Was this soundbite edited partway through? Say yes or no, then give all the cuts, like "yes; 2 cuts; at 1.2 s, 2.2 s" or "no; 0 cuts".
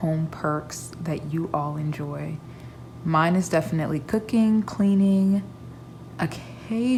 no; 0 cuts